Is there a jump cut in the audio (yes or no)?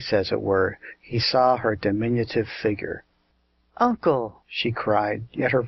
yes